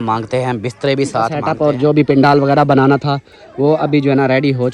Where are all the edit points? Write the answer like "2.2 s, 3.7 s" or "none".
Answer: 1.5 s